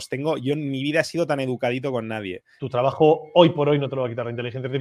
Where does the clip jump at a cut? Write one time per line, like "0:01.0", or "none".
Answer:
0:02.5